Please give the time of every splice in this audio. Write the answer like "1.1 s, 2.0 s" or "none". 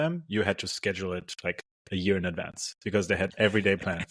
none